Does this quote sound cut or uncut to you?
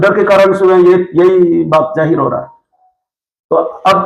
uncut